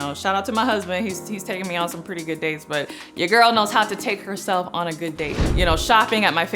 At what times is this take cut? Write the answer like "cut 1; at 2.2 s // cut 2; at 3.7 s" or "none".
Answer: cut 1; at 5.4 s